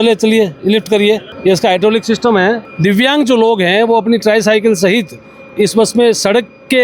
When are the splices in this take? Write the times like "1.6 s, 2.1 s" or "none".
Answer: 1.3 s, 2.7 s